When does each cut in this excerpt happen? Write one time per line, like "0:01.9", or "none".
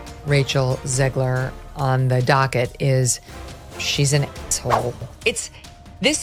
none